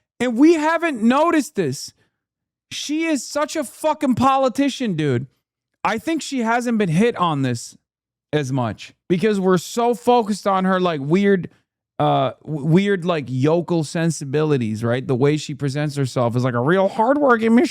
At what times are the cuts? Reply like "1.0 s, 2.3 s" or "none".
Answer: 8.9 s